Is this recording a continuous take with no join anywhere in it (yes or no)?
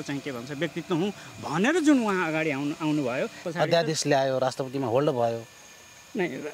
no